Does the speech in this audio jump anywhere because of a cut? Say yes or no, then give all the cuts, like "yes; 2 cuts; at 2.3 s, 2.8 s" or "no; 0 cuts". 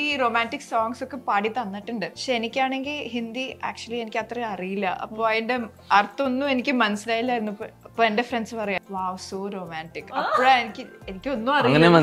yes; 2 cuts; at 2.2 s, 8.8 s